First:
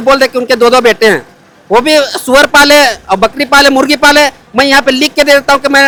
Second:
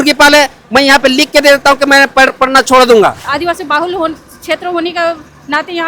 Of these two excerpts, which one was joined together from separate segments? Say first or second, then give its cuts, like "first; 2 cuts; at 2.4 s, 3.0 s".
second; 1 cut; at 3.3 s